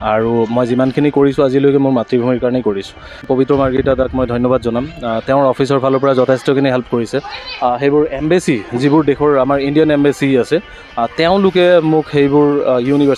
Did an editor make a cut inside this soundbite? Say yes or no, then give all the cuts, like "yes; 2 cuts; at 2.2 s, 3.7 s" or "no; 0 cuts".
yes; 1 cut; at 3.3 s